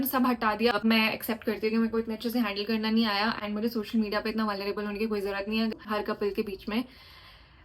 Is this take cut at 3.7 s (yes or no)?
no